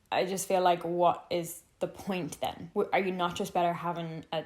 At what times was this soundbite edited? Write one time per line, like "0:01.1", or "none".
none